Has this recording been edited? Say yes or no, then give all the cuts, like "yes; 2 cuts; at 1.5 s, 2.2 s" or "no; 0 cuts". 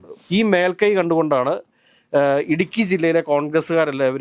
no; 0 cuts